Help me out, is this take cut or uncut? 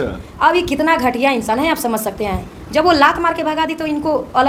uncut